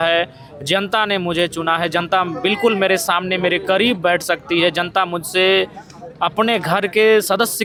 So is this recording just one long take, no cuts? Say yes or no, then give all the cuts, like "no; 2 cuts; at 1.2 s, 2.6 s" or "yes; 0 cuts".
yes; 0 cuts